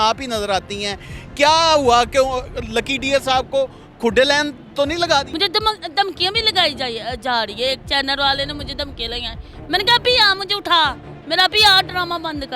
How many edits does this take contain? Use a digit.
1